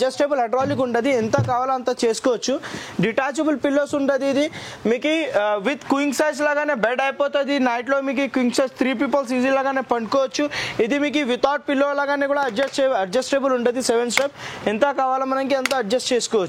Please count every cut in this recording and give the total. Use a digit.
0